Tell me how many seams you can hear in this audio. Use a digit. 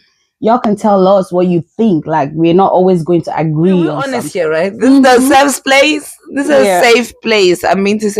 1